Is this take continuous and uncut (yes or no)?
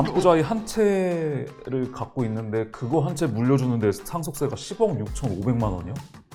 yes